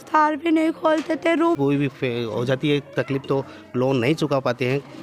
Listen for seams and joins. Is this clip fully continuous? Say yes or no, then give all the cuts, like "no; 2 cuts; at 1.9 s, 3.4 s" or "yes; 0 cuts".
no; 1 cut; at 1.5 s